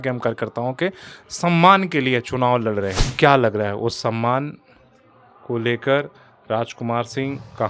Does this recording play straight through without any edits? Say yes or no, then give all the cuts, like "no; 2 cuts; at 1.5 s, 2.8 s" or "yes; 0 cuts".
no; 1 cut; at 3.0 s